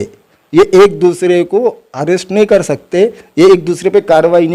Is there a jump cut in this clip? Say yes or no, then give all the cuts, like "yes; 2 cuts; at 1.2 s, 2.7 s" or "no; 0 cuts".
no; 0 cuts